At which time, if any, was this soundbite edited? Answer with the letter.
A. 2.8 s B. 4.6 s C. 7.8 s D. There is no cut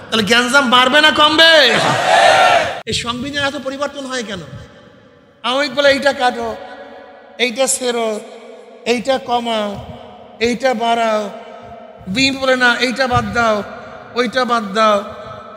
A